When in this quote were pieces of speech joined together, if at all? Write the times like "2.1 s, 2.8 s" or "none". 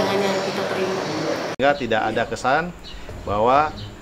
1.6 s